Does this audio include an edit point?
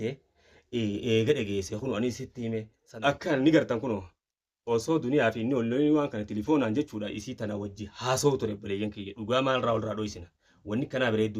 yes; 1 cut; at 2.8 s

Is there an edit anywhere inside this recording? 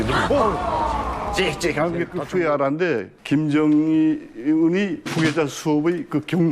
yes; 1 cut; at 2.2 s

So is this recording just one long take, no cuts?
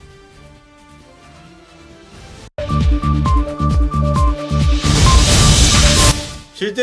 yes; 0 cuts

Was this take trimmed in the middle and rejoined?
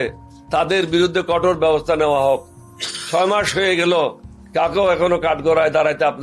no; 0 cuts

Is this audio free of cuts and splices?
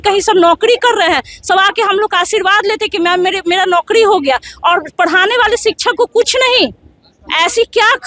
yes; 0 cuts

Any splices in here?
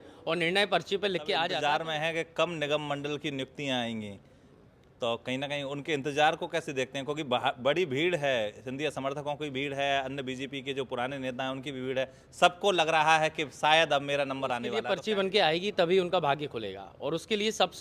yes; 2 cuts; at 1.5 s, 14.8 s

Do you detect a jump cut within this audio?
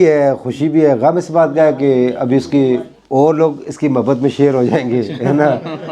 yes; 1 cut; at 3.0 s

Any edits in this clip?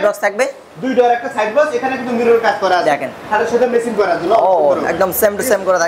no; 0 cuts

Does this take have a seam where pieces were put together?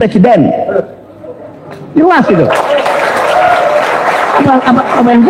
no; 0 cuts

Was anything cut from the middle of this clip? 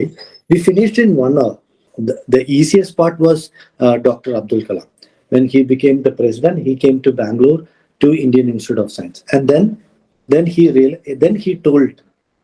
yes; 1 cut; at 1.9 s

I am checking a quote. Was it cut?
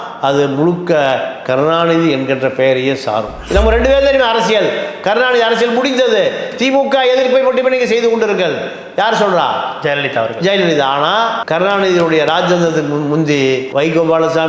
yes; 1 cut; at 3.4 s

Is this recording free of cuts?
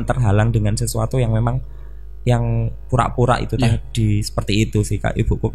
yes; 0 cuts

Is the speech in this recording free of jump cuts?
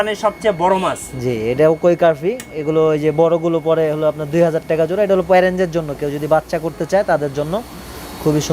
yes; 0 cuts

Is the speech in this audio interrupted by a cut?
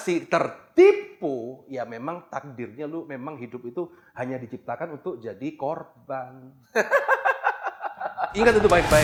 no; 0 cuts

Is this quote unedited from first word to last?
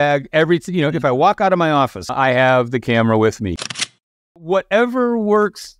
no; 2 cuts; at 2.1 s, 3.9 s

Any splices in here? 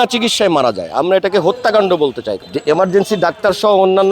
yes; 1 cut; at 2.3 s

